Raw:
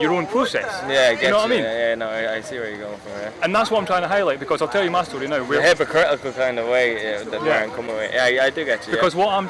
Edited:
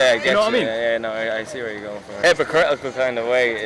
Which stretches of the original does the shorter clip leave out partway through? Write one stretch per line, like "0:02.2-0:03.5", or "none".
0:03.2-0:05.6